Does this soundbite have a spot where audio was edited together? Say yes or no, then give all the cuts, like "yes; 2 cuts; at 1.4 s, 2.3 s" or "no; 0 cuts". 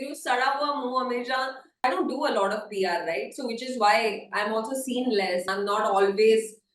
yes; 2 cuts; at 1.8 s, 5.5 s